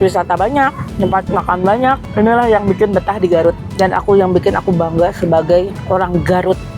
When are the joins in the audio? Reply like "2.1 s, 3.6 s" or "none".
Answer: 0.8 s, 2.1 s, 3.6 s, 5.8 s